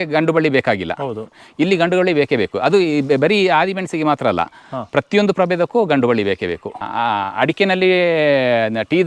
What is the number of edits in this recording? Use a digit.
1